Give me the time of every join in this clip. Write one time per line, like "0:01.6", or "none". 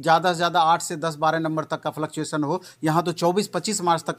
none